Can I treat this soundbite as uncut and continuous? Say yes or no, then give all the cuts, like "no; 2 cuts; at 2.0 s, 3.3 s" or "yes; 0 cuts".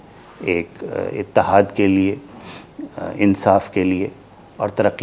yes; 0 cuts